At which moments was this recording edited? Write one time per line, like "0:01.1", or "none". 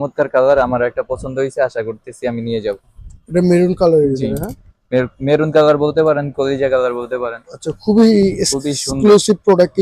none